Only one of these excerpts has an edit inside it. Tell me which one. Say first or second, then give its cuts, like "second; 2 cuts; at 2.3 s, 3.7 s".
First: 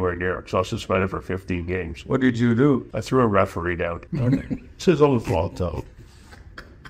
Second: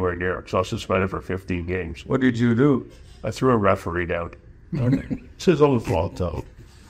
first; 2 cuts; at 2.9 s, 4.0 s